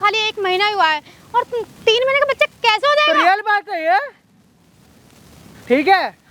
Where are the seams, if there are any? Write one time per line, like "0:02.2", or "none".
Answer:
none